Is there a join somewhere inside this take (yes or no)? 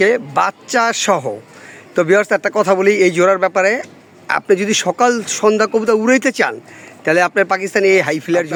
no